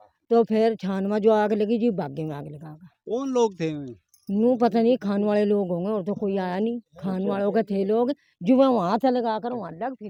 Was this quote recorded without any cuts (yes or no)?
yes